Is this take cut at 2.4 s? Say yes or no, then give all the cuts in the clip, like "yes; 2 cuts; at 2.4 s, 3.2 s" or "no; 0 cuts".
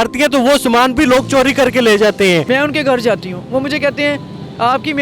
yes; 1 cut; at 2.4 s